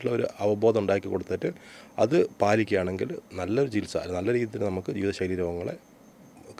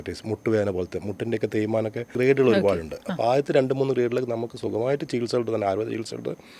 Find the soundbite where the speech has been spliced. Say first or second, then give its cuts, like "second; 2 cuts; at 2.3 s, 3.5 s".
second; 1 cut; at 2.1 s